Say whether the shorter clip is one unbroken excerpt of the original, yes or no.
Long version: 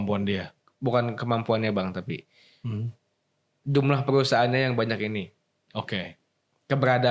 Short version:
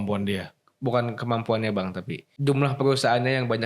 no